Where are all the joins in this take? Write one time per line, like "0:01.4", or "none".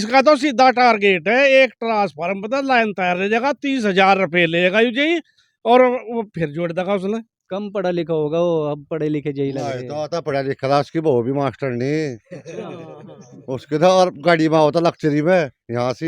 0:07.4